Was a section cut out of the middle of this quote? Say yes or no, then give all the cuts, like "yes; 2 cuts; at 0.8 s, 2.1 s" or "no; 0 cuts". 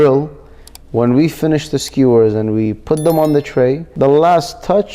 yes; 1 cut; at 3.9 s